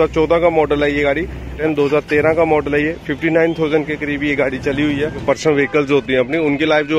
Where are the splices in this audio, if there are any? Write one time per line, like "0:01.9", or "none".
0:01.5
0:05.2